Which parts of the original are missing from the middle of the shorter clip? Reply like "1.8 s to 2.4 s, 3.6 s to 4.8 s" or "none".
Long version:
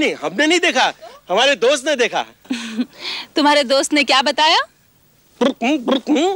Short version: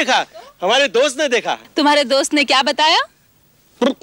2.3 s to 3.2 s

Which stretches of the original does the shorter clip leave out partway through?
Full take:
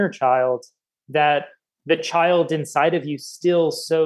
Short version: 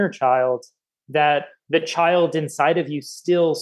1.6 s to 1.7 s

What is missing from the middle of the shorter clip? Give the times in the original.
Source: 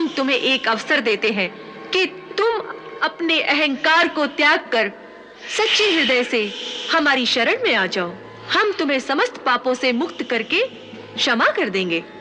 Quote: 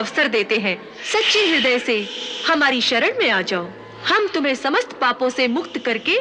1.6 s to 5.4 s

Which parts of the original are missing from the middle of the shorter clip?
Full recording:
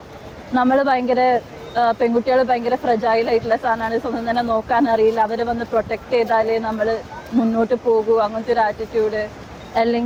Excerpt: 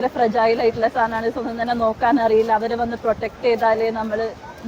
none

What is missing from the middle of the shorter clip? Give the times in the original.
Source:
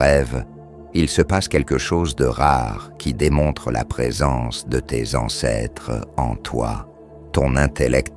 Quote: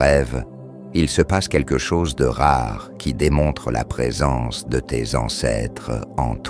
none

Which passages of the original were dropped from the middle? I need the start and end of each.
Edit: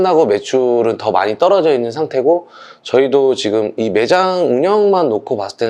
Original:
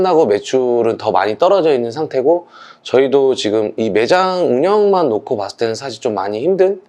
none

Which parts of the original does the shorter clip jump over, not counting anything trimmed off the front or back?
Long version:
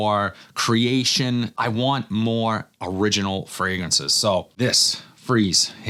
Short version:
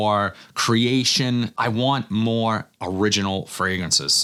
none

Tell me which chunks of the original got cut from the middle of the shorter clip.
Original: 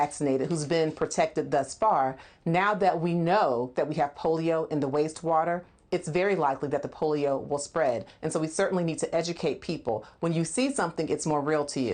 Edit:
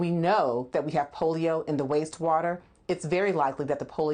none

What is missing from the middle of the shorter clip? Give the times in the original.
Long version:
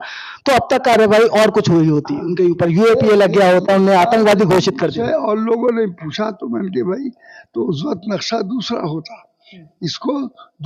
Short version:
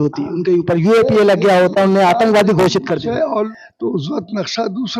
5.4 s to 7.2 s

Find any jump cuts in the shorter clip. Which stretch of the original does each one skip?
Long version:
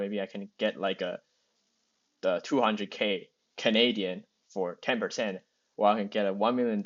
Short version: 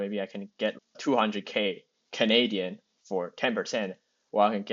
0.9 s to 2.4 s

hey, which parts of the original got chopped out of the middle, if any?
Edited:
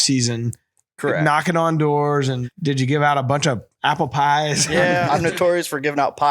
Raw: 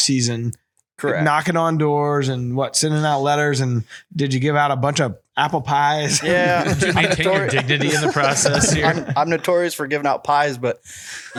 2.4 s to 4.0 s, 6.6 s to 9.1 s

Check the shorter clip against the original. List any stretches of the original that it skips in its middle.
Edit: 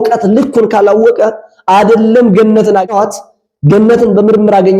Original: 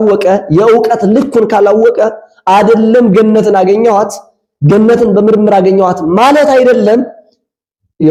3.8 s to 4.0 s

